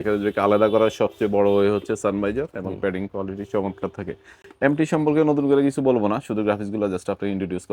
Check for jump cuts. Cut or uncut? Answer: uncut